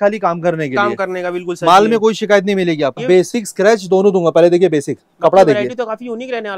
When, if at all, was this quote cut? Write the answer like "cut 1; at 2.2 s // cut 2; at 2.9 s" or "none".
cut 1; at 3.0 s